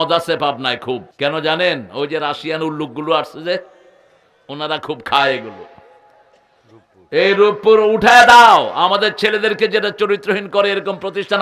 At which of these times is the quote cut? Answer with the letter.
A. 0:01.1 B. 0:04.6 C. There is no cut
A